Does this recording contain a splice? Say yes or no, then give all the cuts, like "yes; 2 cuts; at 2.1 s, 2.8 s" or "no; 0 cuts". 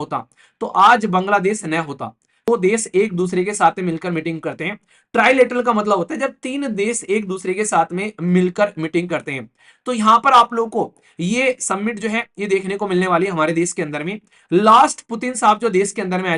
yes; 1 cut; at 2.5 s